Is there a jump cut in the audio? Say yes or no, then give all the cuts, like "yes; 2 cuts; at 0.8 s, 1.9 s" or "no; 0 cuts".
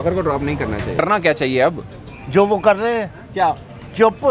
yes; 1 cut; at 1.0 s